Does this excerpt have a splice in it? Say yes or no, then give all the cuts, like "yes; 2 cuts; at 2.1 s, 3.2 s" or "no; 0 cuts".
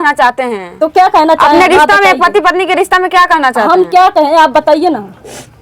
no; 0 cuts